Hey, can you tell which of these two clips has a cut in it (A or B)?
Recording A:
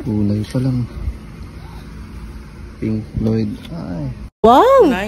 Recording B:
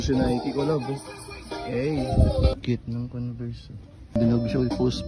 B